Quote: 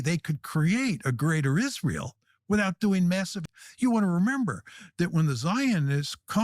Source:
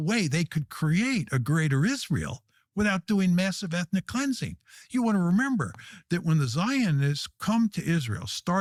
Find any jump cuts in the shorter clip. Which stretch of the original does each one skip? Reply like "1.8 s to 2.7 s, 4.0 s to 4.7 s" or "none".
3.7 s to 4.6 s